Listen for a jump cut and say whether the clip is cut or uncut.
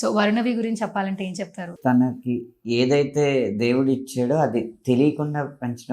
cut